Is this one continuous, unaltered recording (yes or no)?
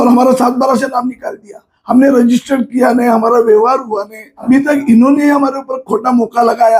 no